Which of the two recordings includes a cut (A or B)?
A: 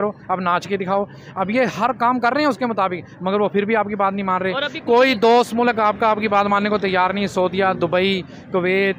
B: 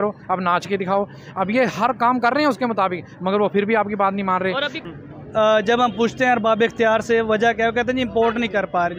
B